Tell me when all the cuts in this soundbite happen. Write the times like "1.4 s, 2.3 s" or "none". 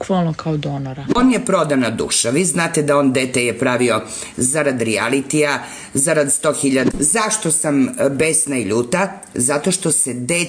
1.2 s, 6.9 s